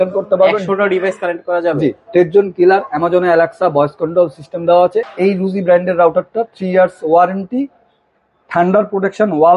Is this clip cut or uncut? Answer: cut